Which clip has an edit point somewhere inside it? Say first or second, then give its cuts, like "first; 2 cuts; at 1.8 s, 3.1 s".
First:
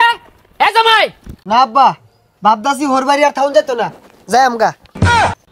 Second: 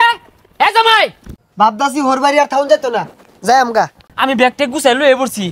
second; 2 cuts; at 1.3 s, 4.0 s